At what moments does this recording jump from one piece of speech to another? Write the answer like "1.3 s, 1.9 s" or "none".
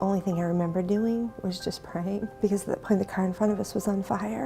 2.3 s